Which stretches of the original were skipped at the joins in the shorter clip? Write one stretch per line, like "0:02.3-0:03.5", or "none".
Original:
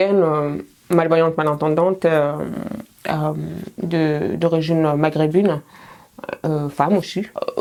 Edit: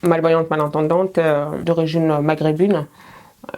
0:02.5-0:04.4